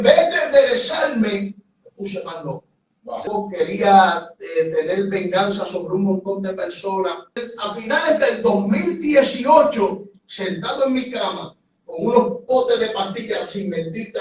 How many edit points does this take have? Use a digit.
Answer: 2